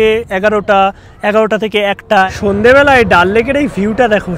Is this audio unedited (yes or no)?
no